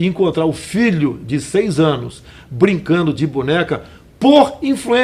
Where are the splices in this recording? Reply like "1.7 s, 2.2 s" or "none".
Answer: none